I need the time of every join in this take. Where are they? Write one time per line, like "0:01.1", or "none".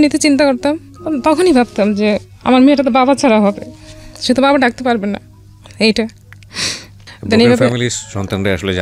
none